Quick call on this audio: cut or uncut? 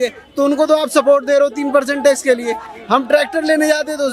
uncut